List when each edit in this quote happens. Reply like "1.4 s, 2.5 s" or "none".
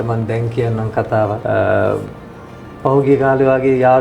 1.4 s